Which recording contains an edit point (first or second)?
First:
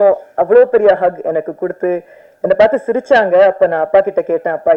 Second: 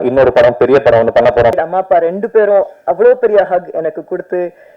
second